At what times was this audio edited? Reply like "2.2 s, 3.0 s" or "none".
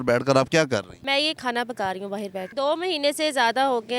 0.9 s, 2.4 s

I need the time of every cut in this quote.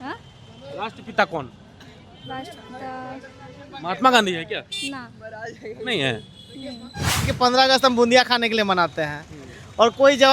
7.3 s

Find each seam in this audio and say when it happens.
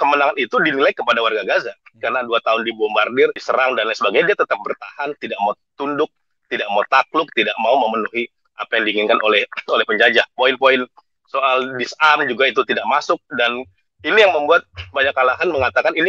none

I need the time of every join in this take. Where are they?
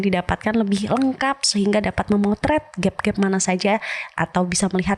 none

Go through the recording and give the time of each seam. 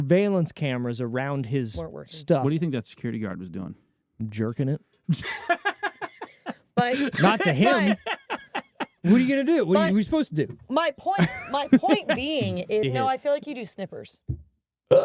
12.8 s

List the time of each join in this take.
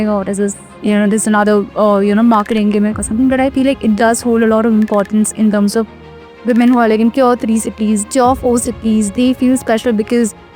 none

